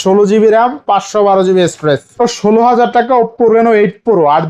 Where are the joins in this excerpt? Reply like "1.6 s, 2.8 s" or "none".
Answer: 2.1 s